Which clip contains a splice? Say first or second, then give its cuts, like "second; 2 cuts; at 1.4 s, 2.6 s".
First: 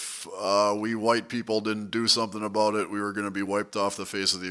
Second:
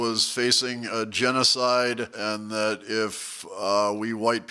second; 1 cut; at 2.1 s